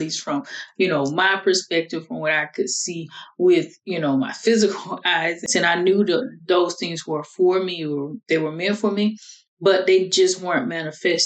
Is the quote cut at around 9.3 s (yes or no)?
no